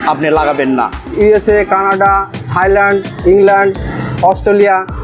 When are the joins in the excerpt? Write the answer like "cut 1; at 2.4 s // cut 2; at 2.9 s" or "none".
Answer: cut 1; at 1.0 s